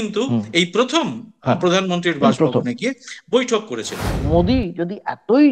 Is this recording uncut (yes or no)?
no